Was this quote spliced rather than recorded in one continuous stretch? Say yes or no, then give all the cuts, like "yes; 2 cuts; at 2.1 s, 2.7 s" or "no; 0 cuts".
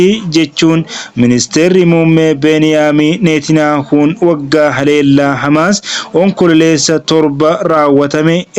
no; 0 cuts